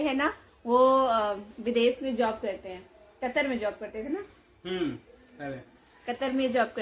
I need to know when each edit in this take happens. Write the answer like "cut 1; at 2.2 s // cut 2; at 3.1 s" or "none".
none